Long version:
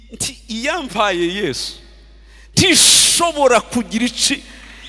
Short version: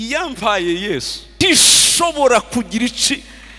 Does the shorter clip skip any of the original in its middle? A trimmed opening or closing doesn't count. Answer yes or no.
yes